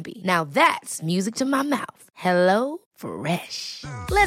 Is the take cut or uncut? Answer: uncut